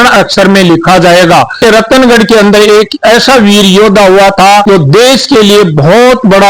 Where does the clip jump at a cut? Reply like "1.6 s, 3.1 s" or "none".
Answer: 1.6 s